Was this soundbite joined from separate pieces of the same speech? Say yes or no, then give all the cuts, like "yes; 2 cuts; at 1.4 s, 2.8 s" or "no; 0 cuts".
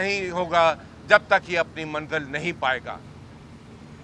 no; 0 cuts